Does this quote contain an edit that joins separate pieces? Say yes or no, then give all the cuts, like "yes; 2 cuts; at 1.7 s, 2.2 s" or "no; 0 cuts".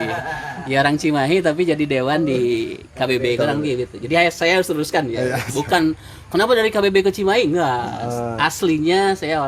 no; 0 cuts